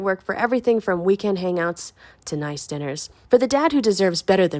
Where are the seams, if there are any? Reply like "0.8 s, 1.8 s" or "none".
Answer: 3.1 s